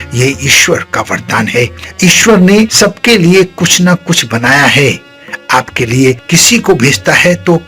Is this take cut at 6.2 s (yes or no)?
yes